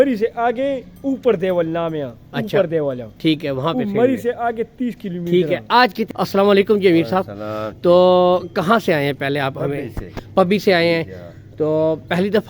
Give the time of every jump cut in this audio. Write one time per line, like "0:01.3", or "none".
0:06.1

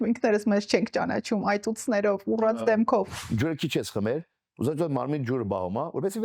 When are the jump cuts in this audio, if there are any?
0:03.2

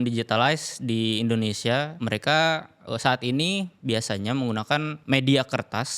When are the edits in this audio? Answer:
0:02.0
0:05.0

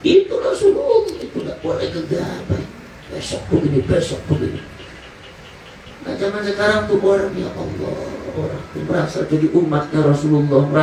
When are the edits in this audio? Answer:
none

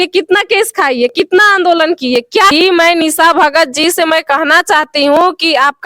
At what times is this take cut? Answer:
0:02.5

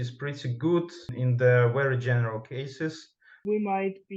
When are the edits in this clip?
0:01.1
0:03.4

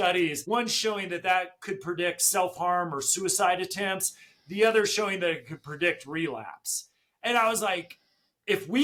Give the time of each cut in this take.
none

